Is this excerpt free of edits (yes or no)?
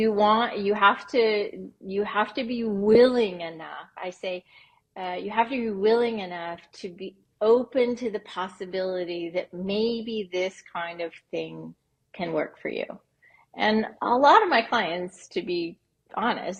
yes